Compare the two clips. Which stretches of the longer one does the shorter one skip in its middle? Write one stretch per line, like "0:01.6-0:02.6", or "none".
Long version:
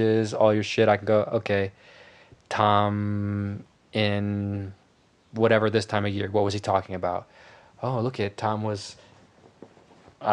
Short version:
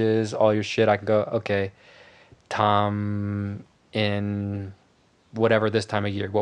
none